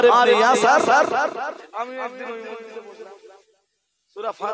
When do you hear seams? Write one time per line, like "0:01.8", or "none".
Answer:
0:01.6